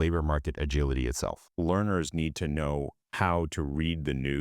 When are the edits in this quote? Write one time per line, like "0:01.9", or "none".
0:01.4
0:03.0